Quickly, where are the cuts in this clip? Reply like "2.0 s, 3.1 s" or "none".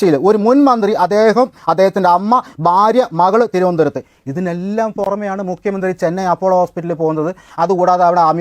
none